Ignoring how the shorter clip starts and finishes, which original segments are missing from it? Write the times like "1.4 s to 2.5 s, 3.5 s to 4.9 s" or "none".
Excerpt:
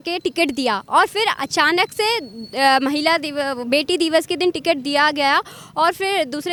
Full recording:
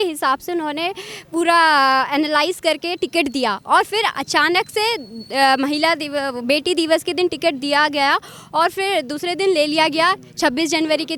none